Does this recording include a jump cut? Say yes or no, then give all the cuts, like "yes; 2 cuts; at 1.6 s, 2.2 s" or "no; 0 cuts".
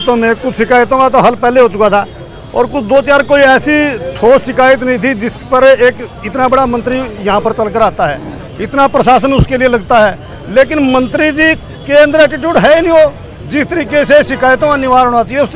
no; 0 cuts